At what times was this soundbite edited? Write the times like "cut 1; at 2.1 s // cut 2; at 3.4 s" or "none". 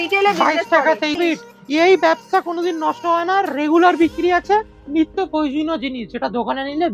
cut 1; at 1.2 s